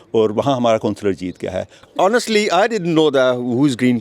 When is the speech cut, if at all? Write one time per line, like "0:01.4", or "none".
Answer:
0:01.8